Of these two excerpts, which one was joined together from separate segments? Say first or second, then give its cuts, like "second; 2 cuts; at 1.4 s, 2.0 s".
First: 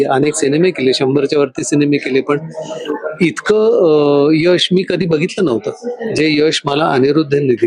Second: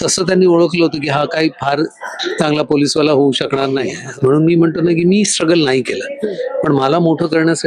second; 1 cut; at 4.0 s